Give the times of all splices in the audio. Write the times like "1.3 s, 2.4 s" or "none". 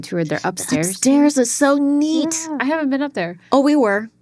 none